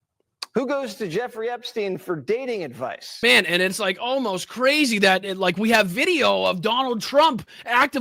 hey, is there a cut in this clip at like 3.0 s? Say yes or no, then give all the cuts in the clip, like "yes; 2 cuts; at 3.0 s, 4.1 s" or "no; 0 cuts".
yes; 1 cut; at 3.0 s